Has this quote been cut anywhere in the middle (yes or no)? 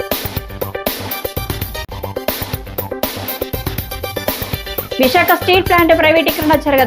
yes